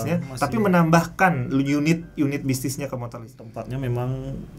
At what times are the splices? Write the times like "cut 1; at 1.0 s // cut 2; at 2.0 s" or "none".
cut 1; at 3.5 s